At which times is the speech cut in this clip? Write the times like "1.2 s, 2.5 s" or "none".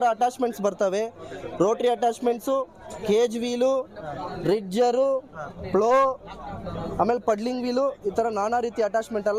none

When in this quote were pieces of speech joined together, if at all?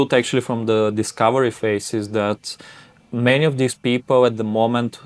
none

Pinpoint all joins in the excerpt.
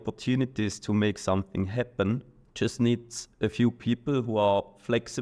2.3 s

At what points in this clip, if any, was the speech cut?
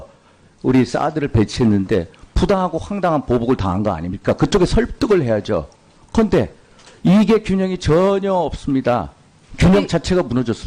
none

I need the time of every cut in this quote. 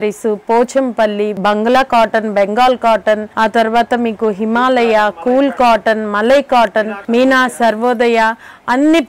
1.4 s, 3.3 s, 7.0 s

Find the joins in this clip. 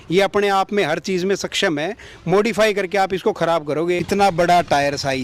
4.0 s

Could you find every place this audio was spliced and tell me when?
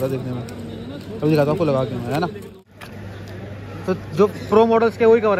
2.5 s

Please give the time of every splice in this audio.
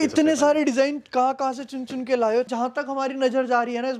2.5 s

